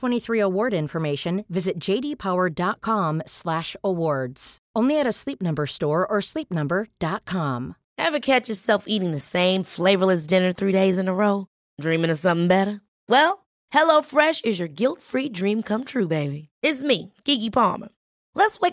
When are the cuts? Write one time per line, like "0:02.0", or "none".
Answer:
0:07.8

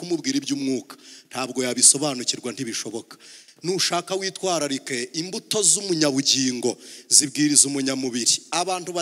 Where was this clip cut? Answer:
none

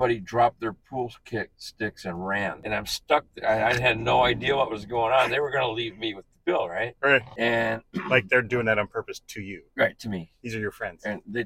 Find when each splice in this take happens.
0:02.6
0:07.3

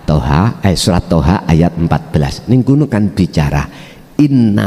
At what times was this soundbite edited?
none

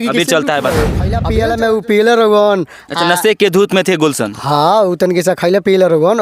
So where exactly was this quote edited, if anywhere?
0:01.2

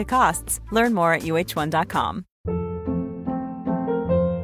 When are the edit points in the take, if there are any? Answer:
0:02.3

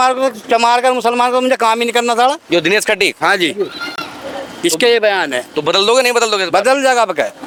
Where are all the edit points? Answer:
none

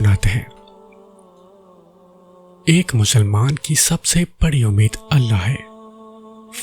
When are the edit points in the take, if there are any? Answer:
0:01.2
0:02.6

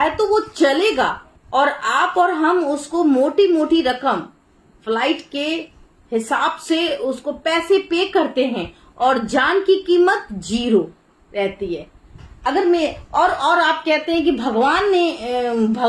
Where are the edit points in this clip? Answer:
none

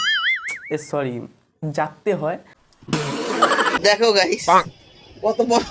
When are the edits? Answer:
0:03.8

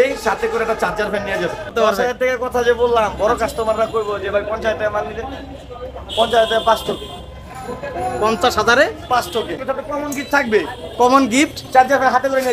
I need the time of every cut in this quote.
0:02.0
0:09.6

